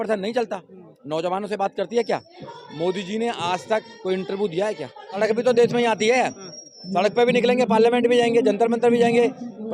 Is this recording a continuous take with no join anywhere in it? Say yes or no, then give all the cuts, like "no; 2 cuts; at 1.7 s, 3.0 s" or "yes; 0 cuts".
no; 1 cut; at 5.2 s